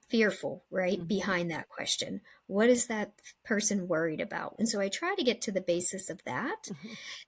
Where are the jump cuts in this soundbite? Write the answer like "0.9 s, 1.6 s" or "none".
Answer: 4.5 s